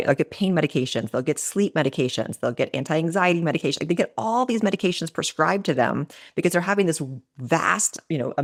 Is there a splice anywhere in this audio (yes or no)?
no